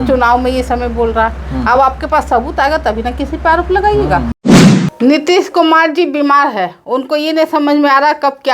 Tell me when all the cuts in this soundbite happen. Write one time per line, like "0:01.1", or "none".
0:04.4